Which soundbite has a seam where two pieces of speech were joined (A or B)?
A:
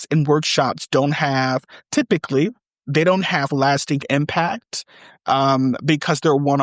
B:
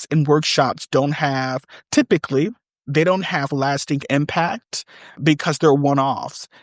B